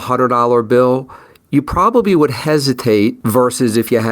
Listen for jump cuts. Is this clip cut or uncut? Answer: cut